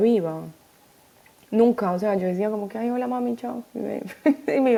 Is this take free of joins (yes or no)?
yes